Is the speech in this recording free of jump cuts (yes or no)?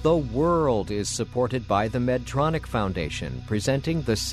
yes